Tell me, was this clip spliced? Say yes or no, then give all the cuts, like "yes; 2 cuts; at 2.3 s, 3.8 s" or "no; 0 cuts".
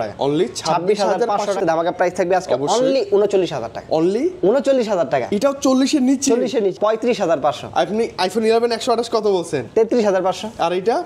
yes; 2 cuts; at 1.6 s, 6.8 s